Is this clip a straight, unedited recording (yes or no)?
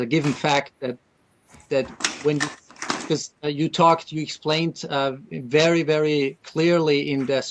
yes